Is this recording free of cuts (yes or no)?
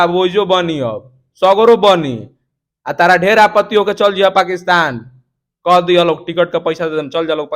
yes